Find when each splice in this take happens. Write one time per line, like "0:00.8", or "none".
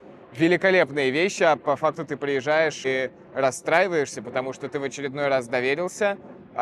0:02.8